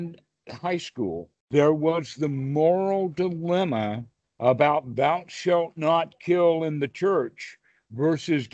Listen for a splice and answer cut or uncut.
cut